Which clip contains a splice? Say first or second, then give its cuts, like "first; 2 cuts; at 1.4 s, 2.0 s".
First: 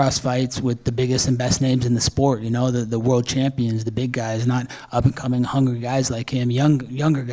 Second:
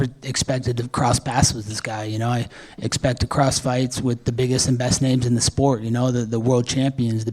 second; 1 cut; at 2.3 s